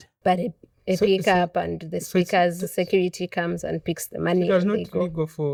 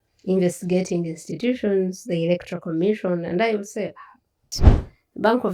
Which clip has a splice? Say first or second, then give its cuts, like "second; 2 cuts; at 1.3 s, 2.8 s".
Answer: second; 1 cut; at 4.6 s